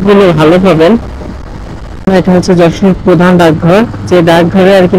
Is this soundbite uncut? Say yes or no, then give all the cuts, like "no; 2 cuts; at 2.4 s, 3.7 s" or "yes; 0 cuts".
no; 1 cut; at 2.1 s